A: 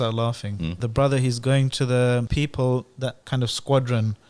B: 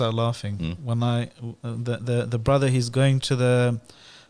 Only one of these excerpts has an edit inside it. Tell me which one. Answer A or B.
A